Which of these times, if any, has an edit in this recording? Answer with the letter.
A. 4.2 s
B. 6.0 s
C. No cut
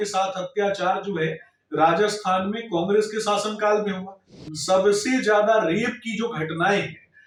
C